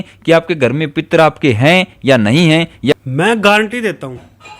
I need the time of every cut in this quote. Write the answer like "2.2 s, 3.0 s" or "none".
3.0 s